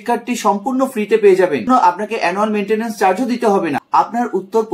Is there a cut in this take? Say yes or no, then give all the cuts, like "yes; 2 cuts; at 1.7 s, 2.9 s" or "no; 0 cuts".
yes; 2 cuts; at 1.7 s, 3.8 s